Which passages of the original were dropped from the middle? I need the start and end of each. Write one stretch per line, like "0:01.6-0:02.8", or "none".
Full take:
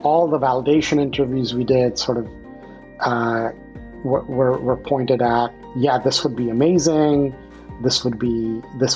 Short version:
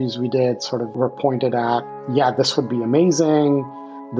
0:02.3-0:04.6